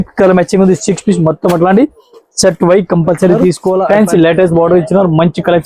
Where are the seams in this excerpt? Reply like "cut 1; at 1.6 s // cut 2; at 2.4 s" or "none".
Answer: cut 1; at 3.9 s